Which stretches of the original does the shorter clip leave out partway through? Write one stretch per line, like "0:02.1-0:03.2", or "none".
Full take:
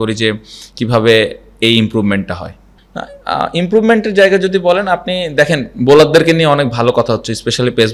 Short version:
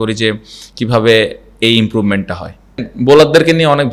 0:02.9-0:05.7